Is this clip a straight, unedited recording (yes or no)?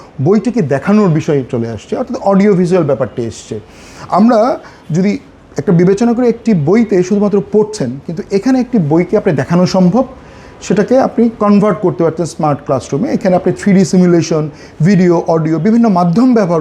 yes